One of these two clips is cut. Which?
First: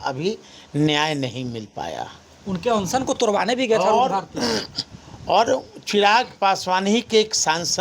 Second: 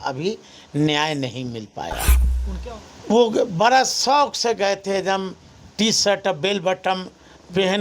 second; 1 cut; at 2.3 s

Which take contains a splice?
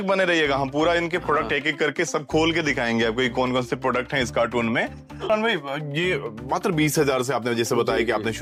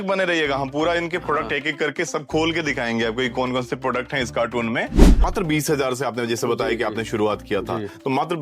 second; 1 cut; at 5.1 s

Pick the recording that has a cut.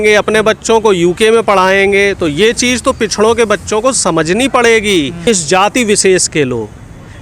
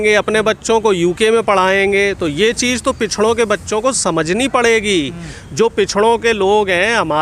first; 1 cut; at 5.2 s

